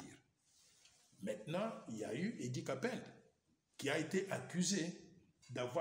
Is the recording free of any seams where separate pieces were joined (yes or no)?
yes